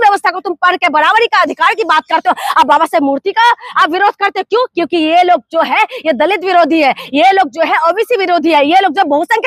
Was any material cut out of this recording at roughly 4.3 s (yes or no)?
no